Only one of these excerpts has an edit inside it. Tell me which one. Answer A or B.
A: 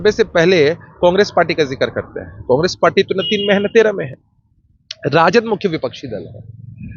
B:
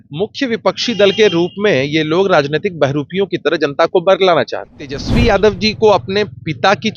B